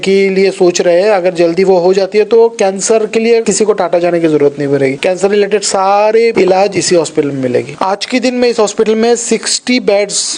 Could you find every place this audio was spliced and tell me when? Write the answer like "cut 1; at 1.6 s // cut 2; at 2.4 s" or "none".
cut 1; at 3.5 s // cut 2; at 5.0 s // cut 3; at 6.3 s // cut 4; at 7.7 s